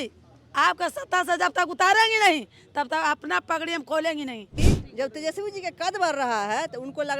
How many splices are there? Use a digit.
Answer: 1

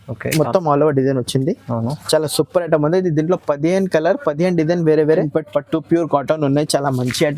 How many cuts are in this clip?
1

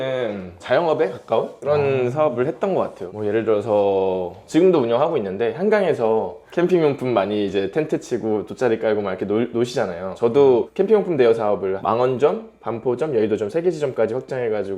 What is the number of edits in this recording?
0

